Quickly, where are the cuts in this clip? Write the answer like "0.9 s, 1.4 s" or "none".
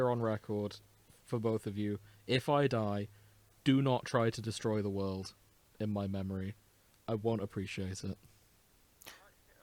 none